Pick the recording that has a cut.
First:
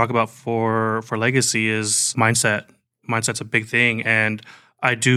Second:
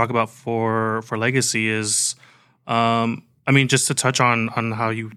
first; 1 cut; at 2.0 s

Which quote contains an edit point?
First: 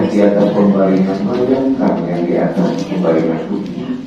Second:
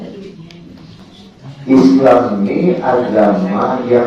second; 1 cut; at 1.0 s

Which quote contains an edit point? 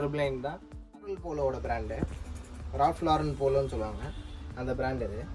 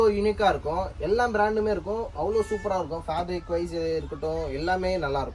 first; 1 cut; at 0.9 s

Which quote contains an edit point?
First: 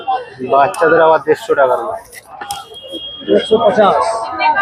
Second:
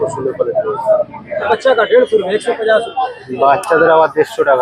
second; 1 cut; at 1.5 s

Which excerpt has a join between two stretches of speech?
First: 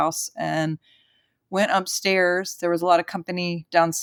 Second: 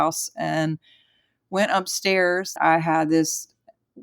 second; 1 cut; at 2.5 s

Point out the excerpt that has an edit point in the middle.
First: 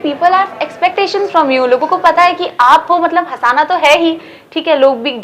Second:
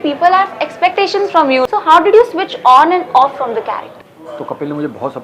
second; 2 cuts; at 1.7 s, 4.2 s

